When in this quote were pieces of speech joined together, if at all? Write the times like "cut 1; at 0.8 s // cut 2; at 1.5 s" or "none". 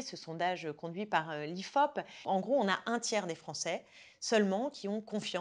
cut 1; at 2.2 s